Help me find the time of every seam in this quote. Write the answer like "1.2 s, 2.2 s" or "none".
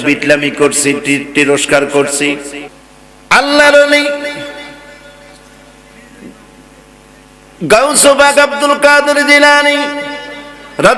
2.6 s